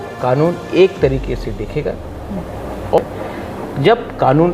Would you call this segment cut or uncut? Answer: cut